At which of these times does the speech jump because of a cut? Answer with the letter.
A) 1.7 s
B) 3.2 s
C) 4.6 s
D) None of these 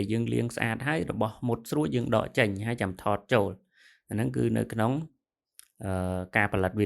D